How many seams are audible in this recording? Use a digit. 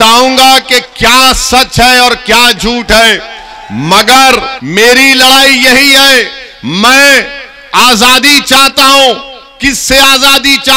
1